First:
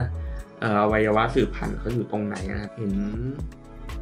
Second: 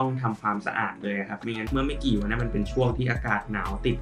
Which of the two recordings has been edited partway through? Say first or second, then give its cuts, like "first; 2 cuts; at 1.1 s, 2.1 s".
second; 1 cut; at 1.6 s